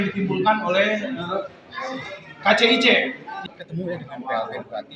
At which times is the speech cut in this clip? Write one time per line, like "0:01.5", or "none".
0:03.3